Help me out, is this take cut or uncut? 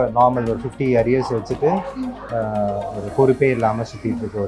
uncut